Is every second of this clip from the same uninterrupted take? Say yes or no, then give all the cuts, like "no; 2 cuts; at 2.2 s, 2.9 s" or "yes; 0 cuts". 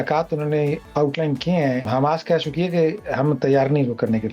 no; 2 cuts; at 0.9 s, 1.9 s